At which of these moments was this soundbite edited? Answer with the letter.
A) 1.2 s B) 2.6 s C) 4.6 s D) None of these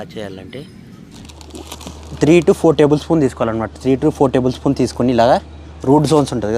A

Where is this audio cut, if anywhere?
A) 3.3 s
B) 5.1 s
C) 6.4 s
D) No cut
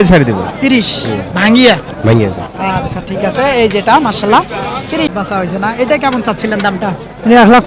B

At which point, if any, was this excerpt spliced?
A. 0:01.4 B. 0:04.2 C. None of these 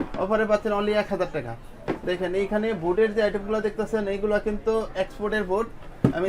C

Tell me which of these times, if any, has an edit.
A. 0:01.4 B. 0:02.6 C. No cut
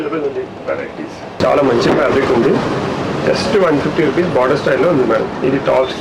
A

